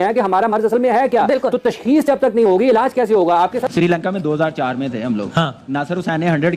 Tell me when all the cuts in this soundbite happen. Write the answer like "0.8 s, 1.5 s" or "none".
3.7 s